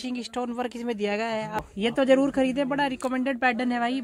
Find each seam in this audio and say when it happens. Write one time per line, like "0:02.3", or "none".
0:01.6